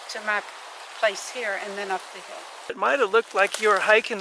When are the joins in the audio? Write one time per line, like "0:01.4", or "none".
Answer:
0:02.8